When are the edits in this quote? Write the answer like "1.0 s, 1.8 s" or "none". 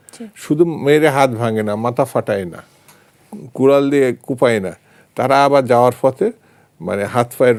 none